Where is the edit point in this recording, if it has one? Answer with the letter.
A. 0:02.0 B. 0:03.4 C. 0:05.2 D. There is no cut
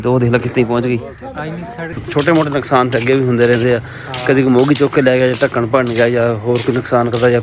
A